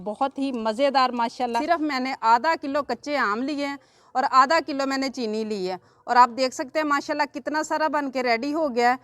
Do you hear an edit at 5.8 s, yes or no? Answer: no